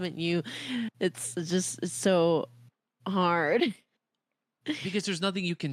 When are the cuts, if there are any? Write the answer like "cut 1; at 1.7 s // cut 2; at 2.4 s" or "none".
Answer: none